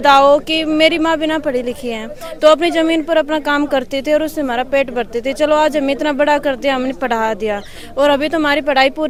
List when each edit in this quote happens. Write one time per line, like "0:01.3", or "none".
none